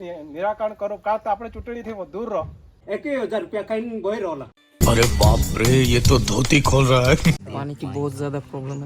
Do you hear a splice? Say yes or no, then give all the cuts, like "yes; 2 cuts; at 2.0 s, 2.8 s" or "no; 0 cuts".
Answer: yes; 2 cuts; at 2.8 s, 7.4 s